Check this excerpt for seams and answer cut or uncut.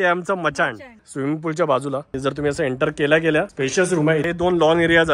cut